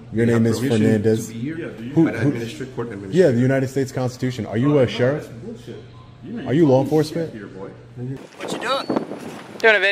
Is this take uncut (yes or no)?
no